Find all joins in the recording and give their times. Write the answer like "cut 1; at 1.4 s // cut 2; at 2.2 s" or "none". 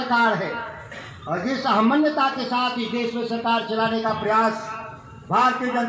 none